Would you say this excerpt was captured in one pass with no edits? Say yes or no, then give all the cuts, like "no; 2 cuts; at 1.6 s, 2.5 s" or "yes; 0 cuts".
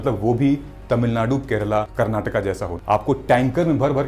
no; 2 cuts; at 1.9 s, 2.8 s